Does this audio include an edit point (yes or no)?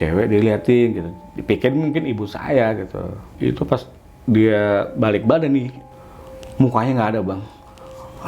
yes